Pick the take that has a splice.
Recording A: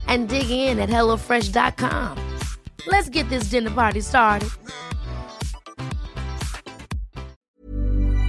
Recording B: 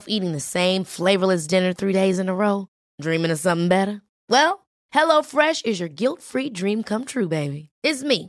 A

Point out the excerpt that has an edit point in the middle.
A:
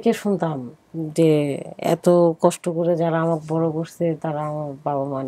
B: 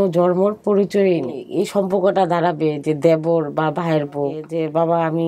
B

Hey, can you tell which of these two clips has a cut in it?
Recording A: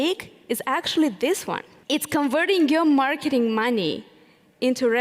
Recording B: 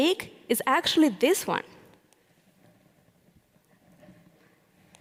A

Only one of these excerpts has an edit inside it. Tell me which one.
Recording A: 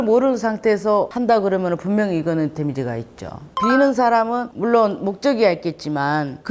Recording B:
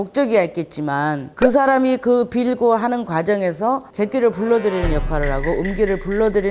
A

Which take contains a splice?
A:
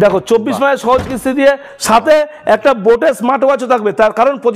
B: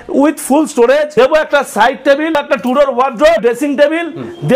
B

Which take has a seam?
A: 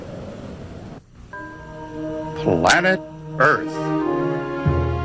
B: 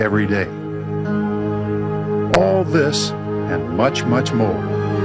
B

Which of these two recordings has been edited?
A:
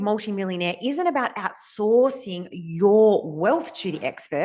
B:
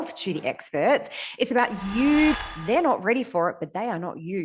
B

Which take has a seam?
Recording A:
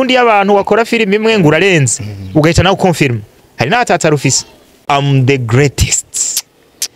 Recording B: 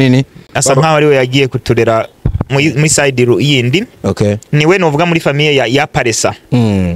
A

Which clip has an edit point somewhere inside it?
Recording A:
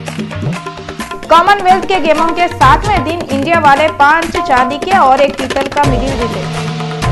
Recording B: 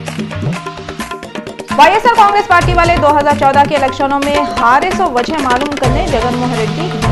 B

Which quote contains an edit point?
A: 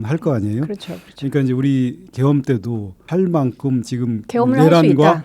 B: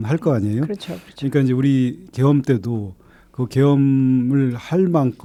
A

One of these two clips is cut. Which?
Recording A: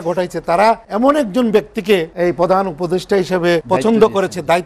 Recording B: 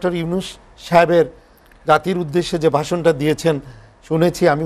A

